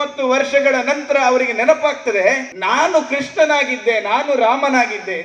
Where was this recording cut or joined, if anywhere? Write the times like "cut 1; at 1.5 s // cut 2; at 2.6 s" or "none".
cut 1; at 2.5 s